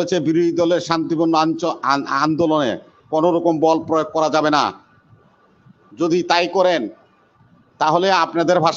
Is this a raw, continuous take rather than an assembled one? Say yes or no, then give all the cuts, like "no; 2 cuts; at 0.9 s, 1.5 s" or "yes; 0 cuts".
yes; 0 cuts